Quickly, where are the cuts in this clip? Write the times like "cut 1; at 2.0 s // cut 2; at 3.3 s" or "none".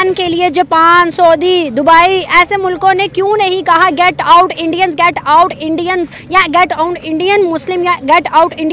none